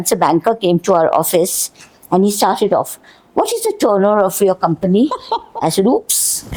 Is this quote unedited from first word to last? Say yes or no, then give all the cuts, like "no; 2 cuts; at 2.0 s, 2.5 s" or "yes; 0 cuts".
yes; 0 cuts